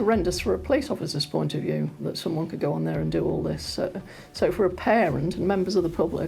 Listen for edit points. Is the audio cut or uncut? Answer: cut